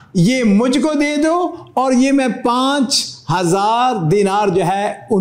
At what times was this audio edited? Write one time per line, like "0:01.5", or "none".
none